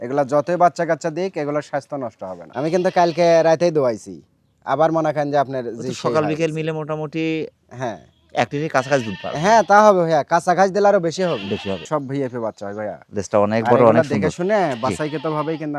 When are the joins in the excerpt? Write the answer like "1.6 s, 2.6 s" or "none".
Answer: 2.4 s, 11.8 s